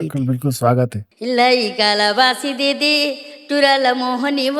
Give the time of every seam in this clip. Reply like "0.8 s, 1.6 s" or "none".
1.1 s